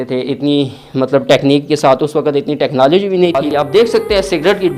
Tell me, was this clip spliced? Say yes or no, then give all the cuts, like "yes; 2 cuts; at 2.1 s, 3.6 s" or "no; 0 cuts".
yes; 1 cut; at 3.4 s